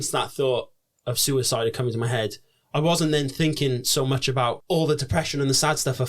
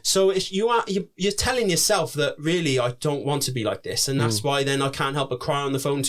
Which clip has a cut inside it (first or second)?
first